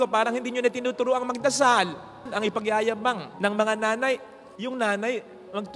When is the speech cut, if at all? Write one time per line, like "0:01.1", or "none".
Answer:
0:02.2
0:04.4